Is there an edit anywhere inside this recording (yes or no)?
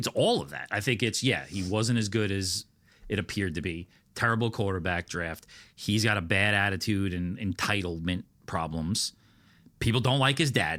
no